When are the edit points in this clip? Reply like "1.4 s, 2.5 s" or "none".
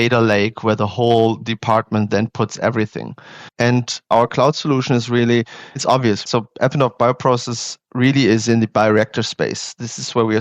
3.7 s

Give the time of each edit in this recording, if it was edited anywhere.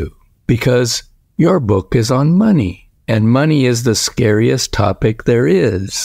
none

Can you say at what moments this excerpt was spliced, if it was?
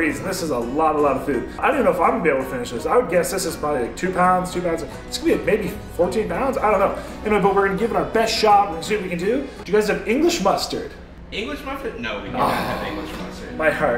9.5 s

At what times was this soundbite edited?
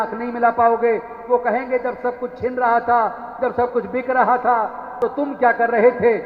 4.9 s

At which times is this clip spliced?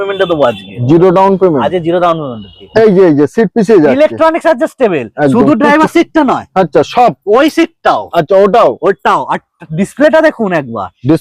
2.6 s

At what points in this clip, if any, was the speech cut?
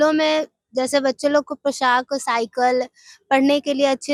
none

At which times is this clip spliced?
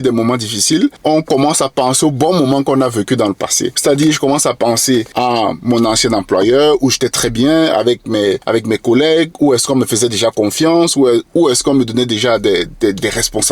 1.0 s, 3.7 s, 5.1 s, 8.4 s

